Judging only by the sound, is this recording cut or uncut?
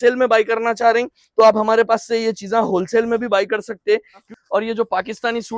cut